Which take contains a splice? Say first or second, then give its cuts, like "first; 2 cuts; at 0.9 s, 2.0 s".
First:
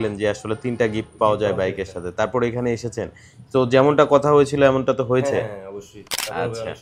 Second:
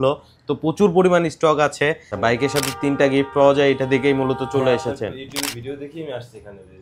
second; 1 cut; at 2.0 s